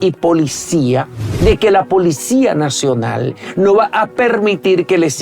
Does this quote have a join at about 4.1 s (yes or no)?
no